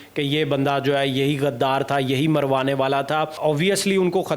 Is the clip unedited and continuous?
no; 1 cut; at 3.3 s

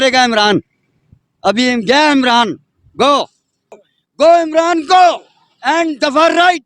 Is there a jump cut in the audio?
yes; 1 cut; at 3.9 s

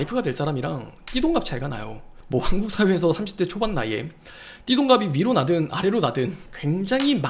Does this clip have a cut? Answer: no; 0 cuts

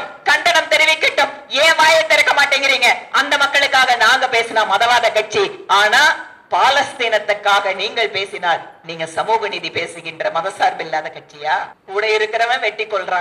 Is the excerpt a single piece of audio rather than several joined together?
no; 1 cut; at 11.8 s

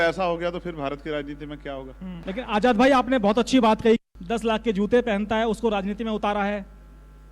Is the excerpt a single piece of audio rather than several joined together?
no; 1 cut; at 2.2 s

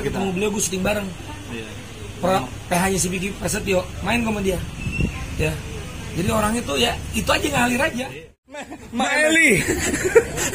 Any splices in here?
yes; 1 cut; at 8.8 s

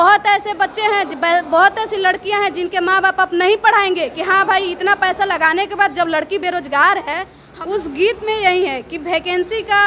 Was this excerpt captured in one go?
no; 1 cut; at 7.4 s

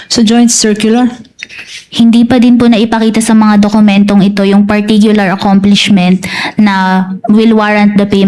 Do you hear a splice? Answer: no; 0 cuts

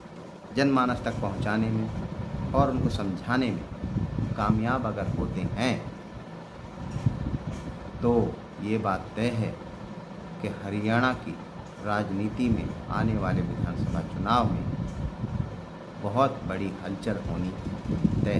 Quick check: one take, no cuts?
yes; 0 cuts

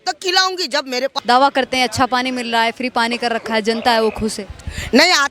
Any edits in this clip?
yes; 1 cut; at 1.1 s

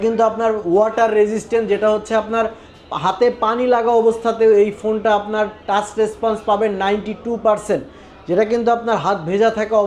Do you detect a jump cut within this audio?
no; 0 cuts

